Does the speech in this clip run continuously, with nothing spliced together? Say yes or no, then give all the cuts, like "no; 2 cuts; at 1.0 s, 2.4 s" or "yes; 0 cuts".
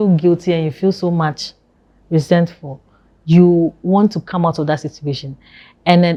yes; 0 cuts